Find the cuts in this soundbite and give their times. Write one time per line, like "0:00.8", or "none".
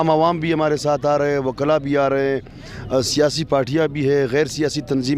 none

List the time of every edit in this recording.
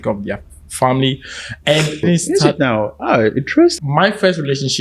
0:02.0
0:03.7

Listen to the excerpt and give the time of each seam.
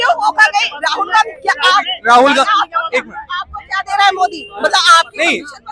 none

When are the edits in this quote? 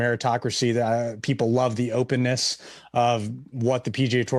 none

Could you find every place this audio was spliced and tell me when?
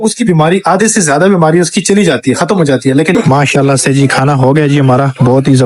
0:03.1

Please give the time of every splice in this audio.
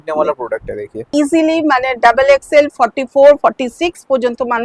0:01.1

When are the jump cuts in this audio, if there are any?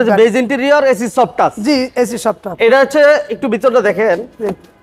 none

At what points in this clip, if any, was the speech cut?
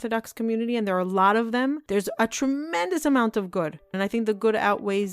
0:01.8
0:03.9

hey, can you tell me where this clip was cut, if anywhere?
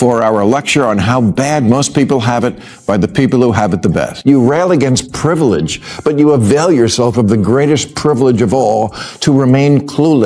0:04.2

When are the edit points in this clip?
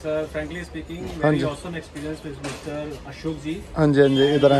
none

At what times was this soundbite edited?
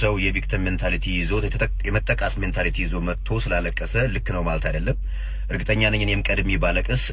none

